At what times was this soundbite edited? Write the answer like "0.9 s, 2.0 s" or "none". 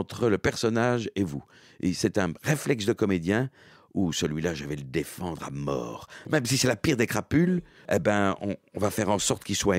6.3 s, 7.8 s